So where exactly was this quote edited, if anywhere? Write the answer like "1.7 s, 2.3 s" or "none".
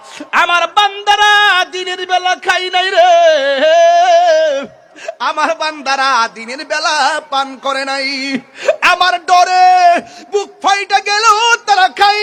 none